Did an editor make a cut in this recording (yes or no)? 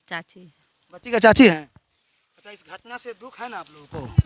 no